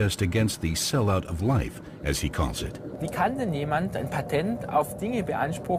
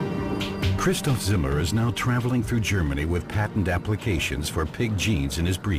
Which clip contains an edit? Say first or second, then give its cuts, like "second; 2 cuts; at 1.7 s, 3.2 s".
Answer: second; 1 cut; at 3.8 s